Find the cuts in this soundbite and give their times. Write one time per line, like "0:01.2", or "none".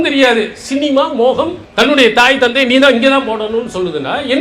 0:01.6